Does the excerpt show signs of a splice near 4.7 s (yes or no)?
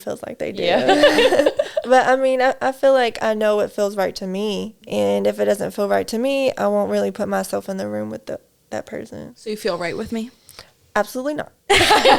yes